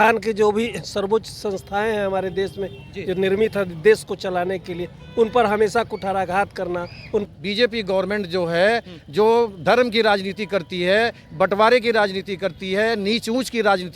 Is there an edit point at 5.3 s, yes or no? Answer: no